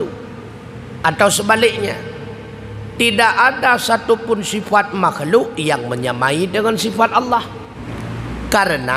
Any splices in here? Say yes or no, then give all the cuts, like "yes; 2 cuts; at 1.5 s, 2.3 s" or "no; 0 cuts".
yes; 1 cut; at 7.8 s